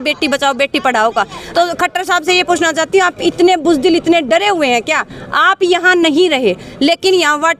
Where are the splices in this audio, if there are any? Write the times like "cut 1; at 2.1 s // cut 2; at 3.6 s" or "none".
cut 1; at 1.4 s